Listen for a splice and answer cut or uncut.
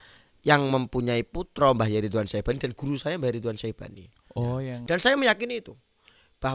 cut